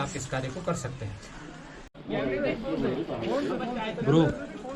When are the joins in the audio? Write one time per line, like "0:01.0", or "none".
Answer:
0:01.9